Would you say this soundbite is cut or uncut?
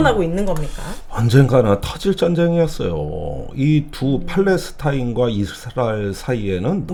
uncut